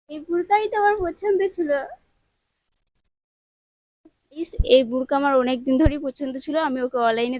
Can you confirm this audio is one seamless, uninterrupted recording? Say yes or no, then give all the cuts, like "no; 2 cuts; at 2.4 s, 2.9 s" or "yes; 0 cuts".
no; 1 cut; at 4.4 s